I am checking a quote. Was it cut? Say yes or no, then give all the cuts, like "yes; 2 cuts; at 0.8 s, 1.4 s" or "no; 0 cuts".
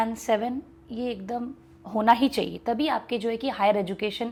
no; 0 cuts